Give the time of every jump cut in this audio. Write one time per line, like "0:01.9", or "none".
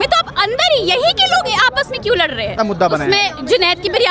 0:02.6